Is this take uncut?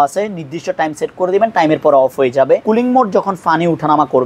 no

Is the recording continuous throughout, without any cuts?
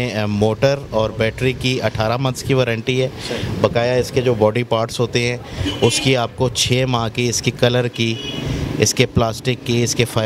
yes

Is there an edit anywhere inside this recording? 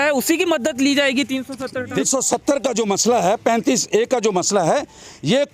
yes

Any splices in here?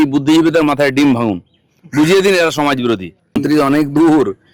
yes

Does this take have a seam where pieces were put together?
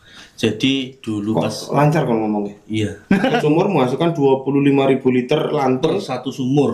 yes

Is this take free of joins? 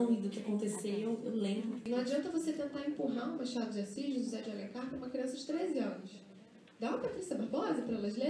no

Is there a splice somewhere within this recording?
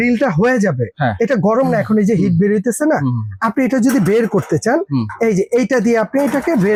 no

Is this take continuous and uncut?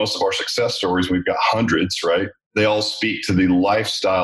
no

